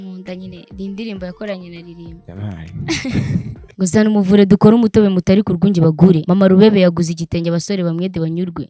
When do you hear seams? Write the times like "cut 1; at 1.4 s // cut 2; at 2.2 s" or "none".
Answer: cut 1; at 3.6 s

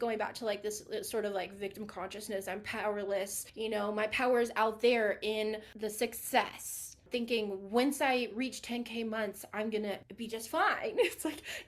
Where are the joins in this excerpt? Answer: cut 1; at 3.4 s // cut 2; at 5.7 s // cut 3; at 7.0 s // cut 4; at 10.1 s

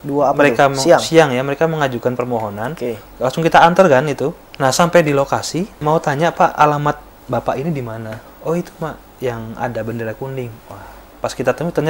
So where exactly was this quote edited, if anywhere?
cut 1; at 4.4 s // cut 2; at 5.7 s

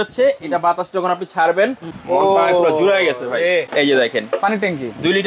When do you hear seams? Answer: cut 1; at 1.9 s // cut 2; at 3.7 s

